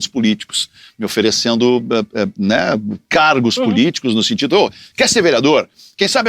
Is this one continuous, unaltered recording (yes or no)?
yes